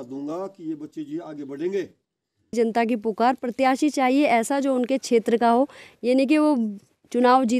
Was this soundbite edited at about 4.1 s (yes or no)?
no